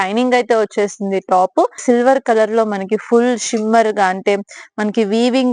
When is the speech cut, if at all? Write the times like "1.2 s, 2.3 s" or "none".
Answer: 1.8 s